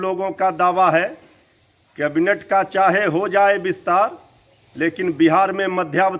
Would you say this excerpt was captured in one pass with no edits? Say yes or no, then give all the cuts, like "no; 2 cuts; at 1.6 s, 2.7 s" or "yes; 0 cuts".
yes; 0 cuts